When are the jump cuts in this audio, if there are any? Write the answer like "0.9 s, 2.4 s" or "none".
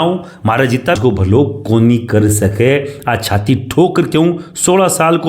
1.0 s